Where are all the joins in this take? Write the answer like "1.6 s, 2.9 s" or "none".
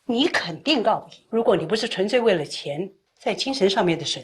1.1 s